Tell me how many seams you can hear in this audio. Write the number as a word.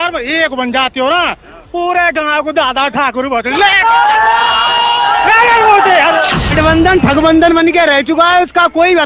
one